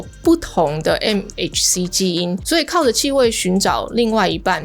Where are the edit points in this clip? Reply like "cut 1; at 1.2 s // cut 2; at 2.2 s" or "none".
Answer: cut 1; at 2.4 s